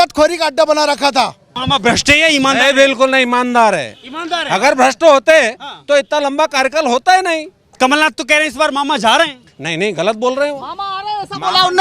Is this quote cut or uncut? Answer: cut